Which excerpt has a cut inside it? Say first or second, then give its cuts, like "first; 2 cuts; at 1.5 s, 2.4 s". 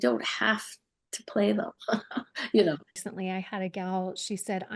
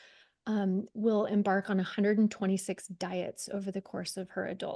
first; 1 cut; at 3.0 s